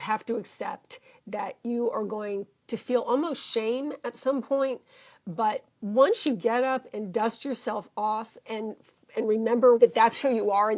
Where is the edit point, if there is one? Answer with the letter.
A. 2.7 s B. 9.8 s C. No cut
B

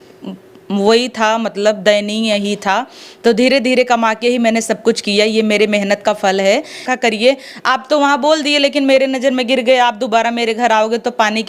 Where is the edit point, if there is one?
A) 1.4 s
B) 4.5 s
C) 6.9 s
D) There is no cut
C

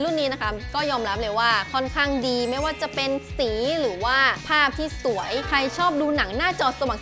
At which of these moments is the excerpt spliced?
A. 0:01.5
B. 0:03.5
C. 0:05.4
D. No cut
C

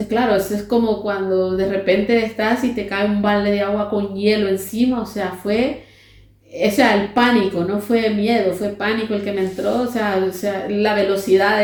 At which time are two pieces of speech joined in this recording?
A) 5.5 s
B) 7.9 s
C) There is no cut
C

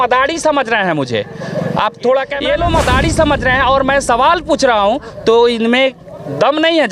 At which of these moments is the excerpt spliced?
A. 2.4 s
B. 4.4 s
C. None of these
A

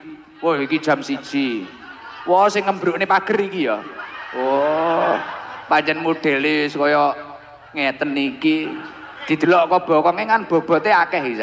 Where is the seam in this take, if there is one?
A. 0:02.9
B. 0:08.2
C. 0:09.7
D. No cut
D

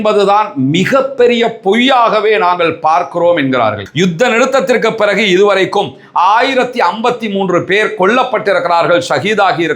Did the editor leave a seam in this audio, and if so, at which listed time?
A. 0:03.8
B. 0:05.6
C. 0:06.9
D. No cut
A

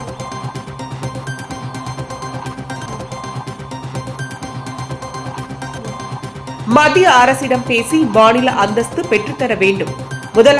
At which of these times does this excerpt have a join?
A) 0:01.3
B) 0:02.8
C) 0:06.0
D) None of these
D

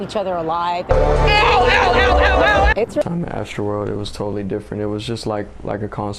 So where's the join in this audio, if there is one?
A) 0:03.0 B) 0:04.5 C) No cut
A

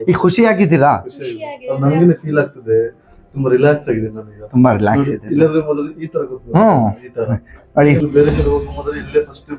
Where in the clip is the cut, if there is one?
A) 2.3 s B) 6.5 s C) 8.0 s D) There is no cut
C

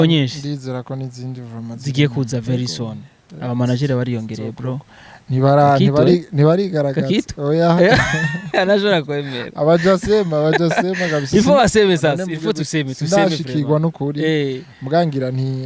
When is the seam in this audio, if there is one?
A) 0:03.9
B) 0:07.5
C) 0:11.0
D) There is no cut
D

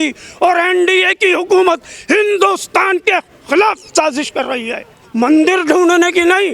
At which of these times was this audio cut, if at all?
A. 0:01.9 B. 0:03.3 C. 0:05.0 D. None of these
C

